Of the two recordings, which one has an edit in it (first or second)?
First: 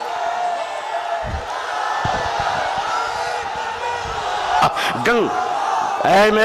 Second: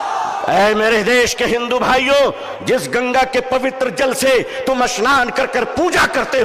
first